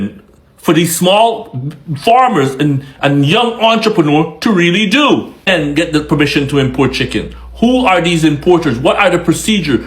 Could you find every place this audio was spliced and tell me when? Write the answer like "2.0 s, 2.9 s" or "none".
5.5 s